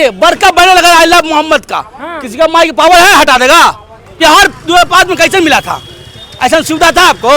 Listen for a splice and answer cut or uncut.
cut